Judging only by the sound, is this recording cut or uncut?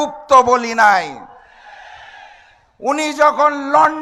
uncut